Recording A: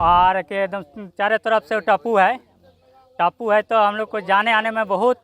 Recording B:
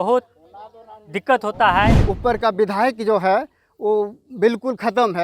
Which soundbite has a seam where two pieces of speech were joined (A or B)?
B